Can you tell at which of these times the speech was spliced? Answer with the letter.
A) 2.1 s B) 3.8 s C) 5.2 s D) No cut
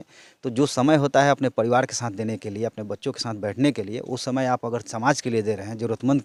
D